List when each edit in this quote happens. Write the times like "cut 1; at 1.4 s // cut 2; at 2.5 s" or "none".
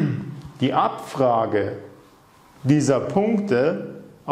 none

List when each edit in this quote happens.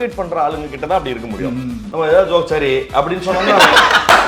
cut 1; at 1.8 s

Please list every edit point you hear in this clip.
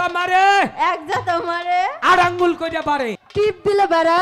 cut 1; at 3.2 s

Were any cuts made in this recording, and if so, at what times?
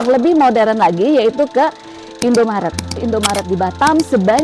cut 1; at 3.0 s

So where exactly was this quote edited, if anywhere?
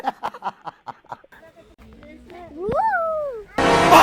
cut 1; at 1.4 s

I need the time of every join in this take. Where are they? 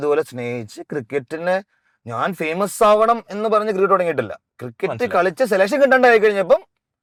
none

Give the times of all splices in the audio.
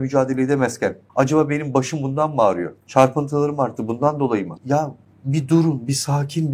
cut 1; at 1.0 s // cut 2; at 2.8 s // cut 3; at 4.6 s

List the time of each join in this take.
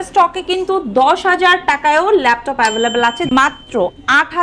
cut 1; at 3.3 s

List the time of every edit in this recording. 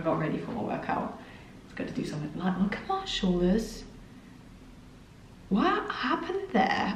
none

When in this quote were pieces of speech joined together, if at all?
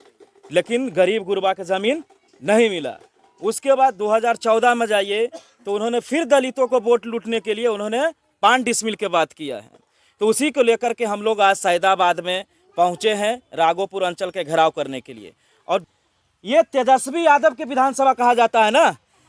cut 1; at 15.8 s

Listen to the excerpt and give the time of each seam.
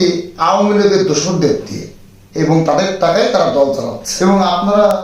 cut 1; at 4.0 s

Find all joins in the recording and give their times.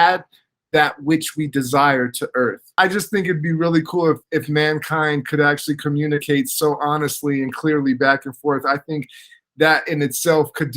cut 1; at 2.6 s

